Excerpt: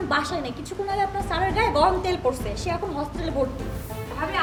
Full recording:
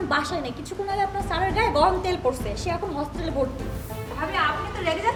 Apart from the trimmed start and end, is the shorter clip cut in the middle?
no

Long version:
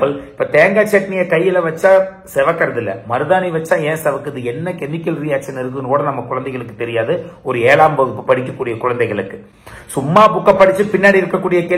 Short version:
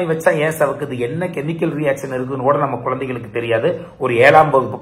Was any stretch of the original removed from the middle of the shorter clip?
no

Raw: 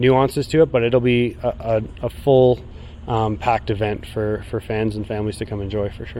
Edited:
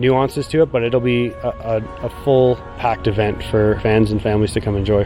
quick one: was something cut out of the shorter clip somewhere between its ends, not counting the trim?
yes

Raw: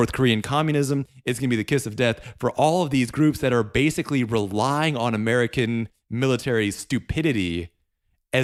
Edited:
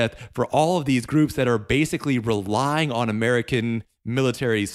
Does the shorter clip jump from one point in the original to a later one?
no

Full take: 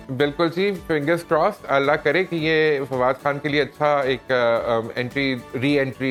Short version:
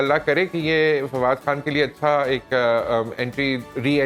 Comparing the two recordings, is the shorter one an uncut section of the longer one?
yes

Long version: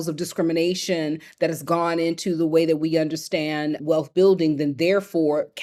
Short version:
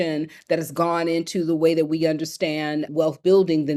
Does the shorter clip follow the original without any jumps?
yes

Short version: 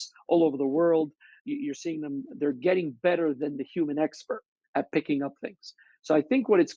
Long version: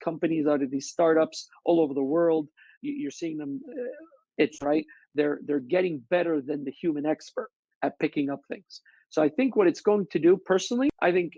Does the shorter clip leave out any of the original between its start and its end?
yes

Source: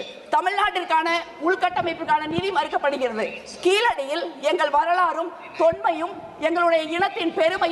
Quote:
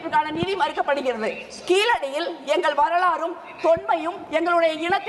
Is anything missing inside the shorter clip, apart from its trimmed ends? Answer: yes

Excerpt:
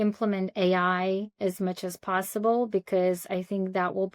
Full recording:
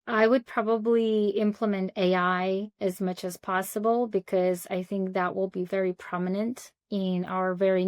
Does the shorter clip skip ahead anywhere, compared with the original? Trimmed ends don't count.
no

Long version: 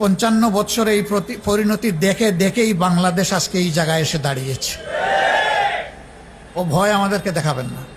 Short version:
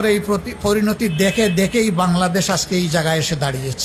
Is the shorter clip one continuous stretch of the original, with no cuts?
yes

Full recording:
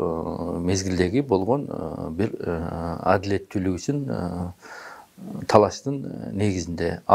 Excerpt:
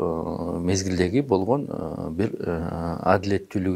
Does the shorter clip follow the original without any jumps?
yes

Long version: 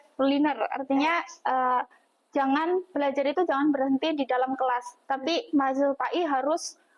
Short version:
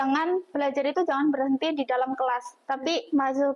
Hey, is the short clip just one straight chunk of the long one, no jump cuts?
yes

